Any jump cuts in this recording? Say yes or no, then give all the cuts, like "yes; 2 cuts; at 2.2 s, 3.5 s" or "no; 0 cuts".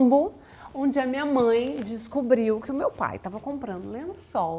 no; 0 cuts